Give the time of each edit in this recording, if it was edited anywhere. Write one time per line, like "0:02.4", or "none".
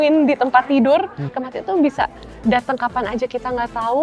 0:01.3